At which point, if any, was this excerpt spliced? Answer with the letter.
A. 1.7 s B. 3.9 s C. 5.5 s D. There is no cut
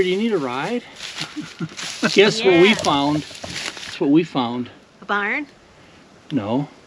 B